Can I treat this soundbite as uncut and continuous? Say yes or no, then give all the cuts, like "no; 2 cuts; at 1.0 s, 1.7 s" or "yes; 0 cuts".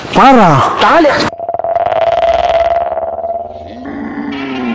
yes; 0 cuts